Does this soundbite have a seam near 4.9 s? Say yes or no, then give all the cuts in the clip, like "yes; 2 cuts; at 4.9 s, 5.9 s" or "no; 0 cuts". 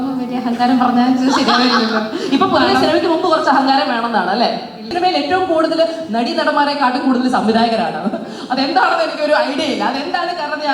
yes; 1 cut; at 4.9 s